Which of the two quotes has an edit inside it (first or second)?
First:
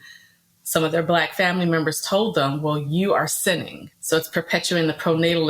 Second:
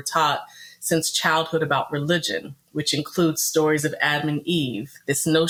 first